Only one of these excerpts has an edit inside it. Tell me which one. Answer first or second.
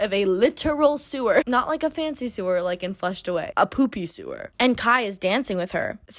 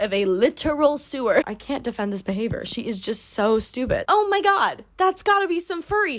second